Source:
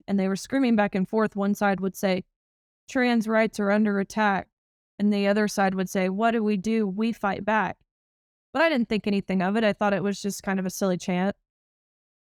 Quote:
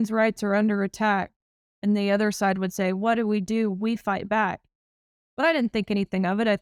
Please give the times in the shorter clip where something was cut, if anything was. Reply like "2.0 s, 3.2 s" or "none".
none

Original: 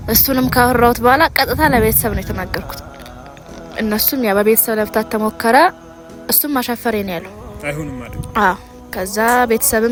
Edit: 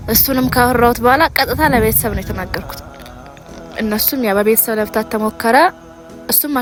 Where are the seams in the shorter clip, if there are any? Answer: none

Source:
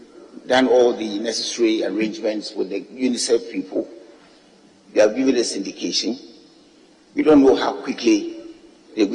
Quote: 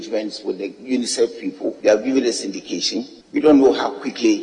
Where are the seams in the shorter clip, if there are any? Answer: 1.8 s, 3.1 s

